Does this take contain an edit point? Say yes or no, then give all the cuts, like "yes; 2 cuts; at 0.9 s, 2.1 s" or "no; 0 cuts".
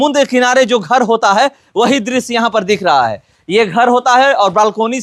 no; 0 cuts